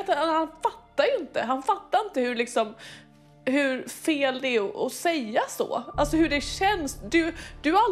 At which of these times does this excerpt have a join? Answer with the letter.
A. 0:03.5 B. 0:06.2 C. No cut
C